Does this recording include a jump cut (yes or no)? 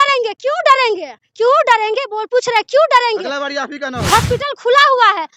yes